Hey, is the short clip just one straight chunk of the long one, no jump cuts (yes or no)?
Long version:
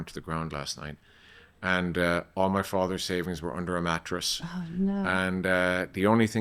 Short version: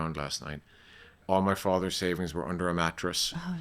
no